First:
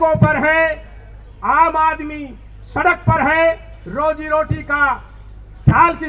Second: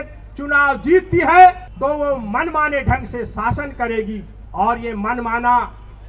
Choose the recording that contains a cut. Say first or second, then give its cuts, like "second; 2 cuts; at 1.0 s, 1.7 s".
second; 2 cuts; at 1.7 s, 4.4 s